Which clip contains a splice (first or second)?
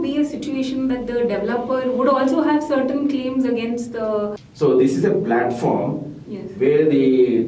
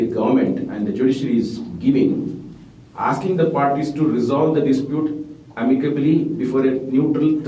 first